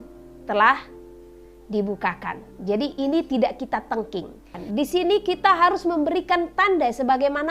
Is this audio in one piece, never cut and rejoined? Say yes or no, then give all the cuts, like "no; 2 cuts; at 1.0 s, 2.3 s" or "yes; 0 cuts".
no; 1 cut; at 4.6 s